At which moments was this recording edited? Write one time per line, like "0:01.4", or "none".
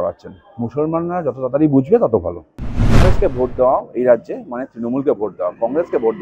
0:03.0